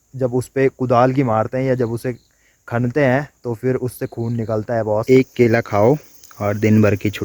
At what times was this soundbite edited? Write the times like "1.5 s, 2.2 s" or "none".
5.0 s

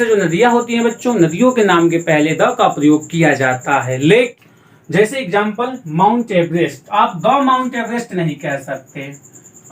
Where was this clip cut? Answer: 4.3 s

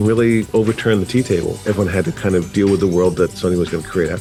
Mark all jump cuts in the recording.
none

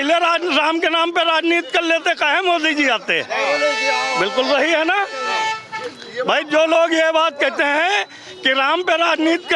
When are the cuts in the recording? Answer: none

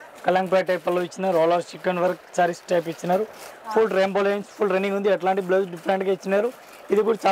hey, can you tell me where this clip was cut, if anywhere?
3.5 s

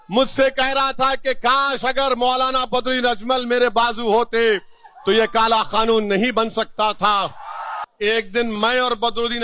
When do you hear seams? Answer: 7.8 s

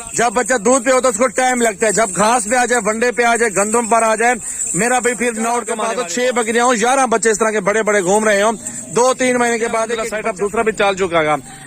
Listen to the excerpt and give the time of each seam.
5.8 s, 10.0 s

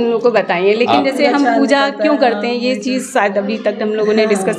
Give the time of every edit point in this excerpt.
none

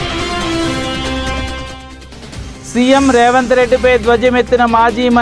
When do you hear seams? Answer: 1.3 s, 2.7 s

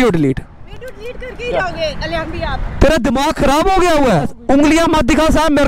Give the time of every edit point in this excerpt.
4.3 s

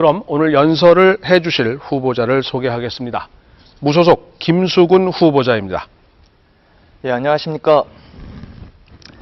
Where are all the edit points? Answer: 8.0 s

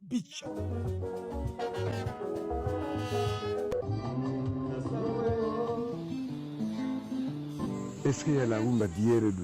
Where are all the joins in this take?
1.3 s

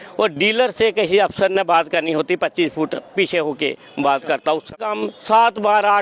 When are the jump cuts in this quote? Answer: 4.8 s

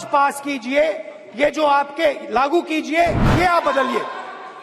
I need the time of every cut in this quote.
3.3 s

